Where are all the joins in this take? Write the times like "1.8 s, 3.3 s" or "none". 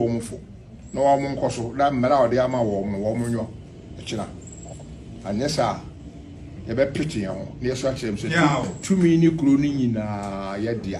none